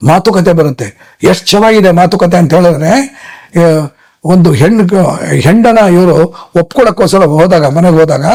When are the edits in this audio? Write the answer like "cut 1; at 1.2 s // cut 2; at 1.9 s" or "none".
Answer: none